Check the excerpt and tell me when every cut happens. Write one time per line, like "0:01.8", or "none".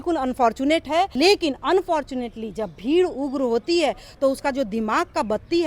0:01.1